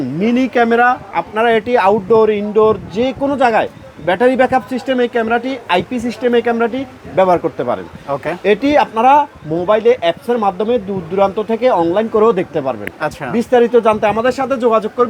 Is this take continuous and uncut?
yes; 0 cuts

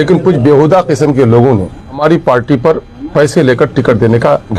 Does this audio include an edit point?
no; 0 cuts

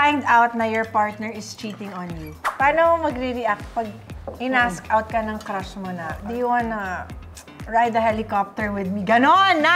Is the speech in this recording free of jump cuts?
no; 2 cuts; at 2.4 s, 6.2 s

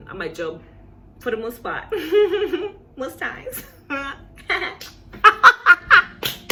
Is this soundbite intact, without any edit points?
yes; 0 cuts

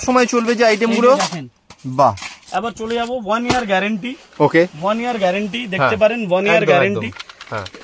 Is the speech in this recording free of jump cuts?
no; 1 cut; at 2.3 s

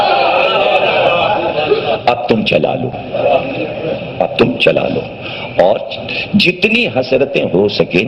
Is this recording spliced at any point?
no; 0 cuts

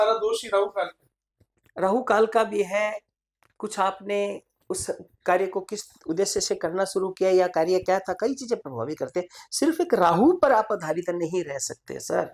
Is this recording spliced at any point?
no; 0 cuts

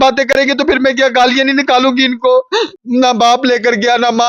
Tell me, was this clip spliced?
yes; 1 cut; at 2.7 s

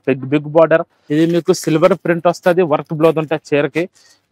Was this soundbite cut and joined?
yes; 1 cut; at 1.0 s

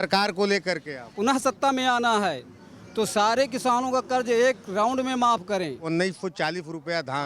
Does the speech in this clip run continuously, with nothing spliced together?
no; 2 cuts; at 1.1 s, 5.8 s

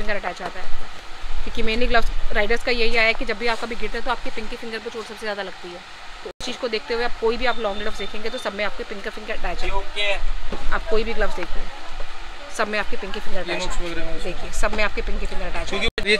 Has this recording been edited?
no; 0 cuts

